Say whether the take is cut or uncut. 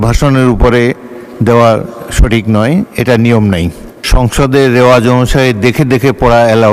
cut